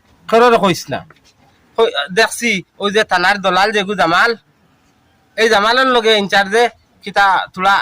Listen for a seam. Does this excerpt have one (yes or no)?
yes